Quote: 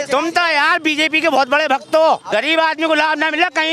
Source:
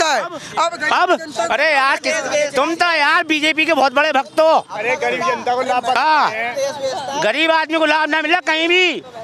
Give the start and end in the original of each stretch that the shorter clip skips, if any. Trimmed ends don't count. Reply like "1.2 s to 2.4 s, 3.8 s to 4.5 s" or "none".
4.7 s to 7.2 s